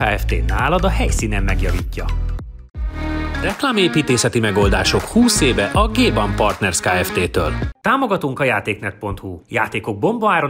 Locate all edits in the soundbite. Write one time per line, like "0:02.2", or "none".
0:02.5
0:07.7